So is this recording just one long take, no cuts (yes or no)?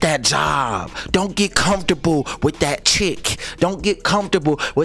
yes